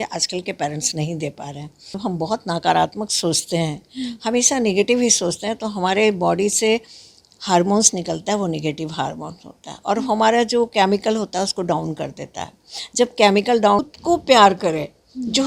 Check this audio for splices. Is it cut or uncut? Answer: cut